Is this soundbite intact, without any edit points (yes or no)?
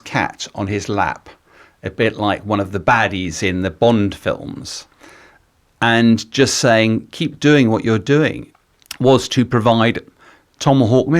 no